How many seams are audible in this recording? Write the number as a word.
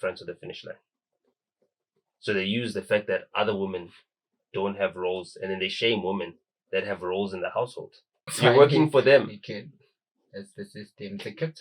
one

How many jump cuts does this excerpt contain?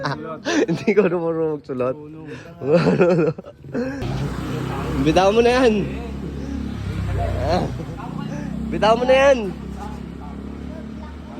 one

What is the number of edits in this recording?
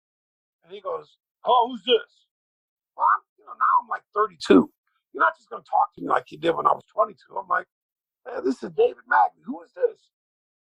zero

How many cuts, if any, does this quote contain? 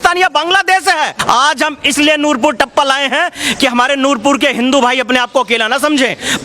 one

